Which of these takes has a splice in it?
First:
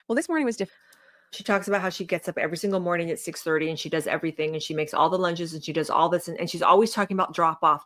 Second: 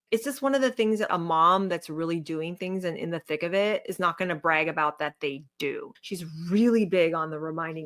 first; 1 cut; at 1.3 s

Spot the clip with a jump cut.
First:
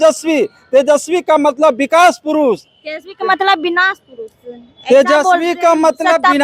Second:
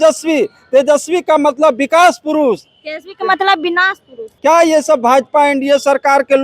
second; 1 cut; at 4.3 s

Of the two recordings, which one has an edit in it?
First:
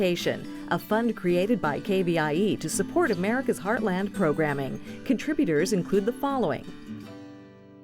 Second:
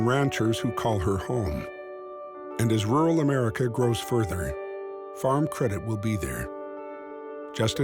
first; 1 cut; at 6.7 s

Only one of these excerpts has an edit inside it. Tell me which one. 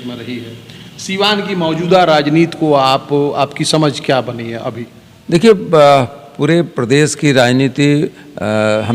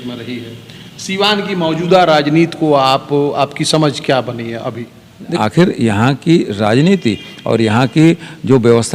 second; 1 cut; at 5.3 s

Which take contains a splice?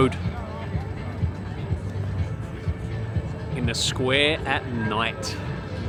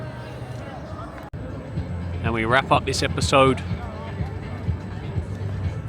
second; 1 cut; at 1.3 s

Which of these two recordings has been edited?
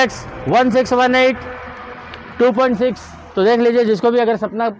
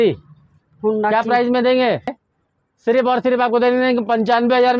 second; 1 cut; at 2.2 s

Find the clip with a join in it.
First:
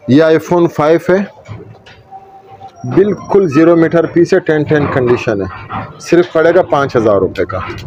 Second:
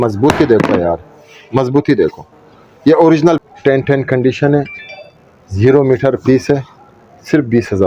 second; 1 cut; at 3.4 s

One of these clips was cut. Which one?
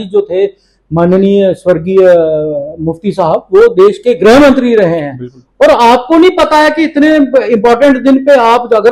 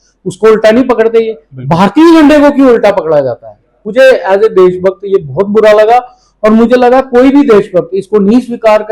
second; 1 cut; at 3.8 s

